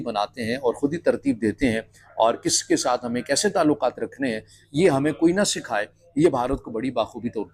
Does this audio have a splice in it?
no; 0 cuts

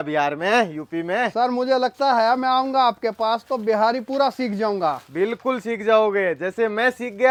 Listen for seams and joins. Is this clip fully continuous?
yes; 0 cuts

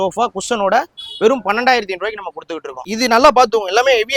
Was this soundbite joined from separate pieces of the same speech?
no; 0 cuts

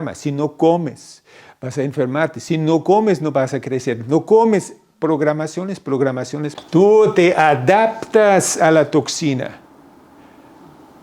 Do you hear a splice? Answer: yes; 1 cut; at 6.6 s

